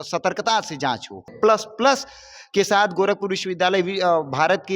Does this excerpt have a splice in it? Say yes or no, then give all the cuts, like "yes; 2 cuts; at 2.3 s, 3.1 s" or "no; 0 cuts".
yes; 1 cut; at 1.3 s